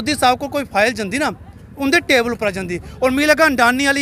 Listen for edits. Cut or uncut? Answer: uncut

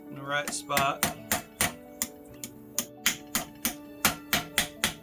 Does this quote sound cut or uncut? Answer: uncut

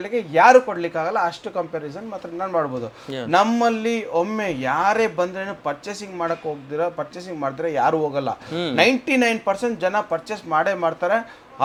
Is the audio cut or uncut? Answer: uncut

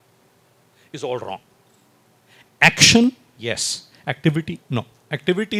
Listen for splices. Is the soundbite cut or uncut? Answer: uncut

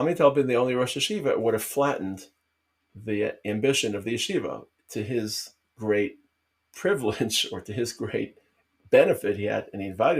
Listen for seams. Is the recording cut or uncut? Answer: uncut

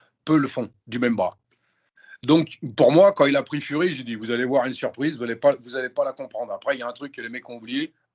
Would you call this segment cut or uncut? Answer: uncut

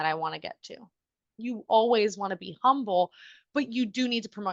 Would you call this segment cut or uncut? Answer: cut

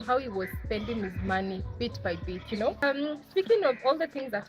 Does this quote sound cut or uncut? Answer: cut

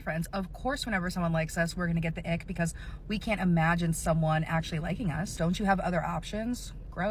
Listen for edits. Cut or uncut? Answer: uncut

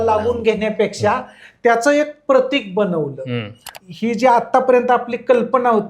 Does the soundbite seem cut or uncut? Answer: cut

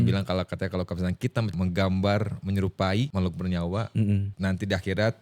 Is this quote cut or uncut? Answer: cut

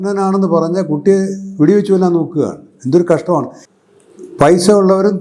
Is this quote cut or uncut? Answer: cut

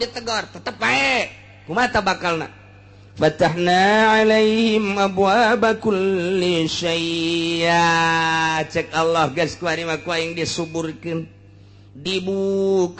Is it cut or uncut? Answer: uncut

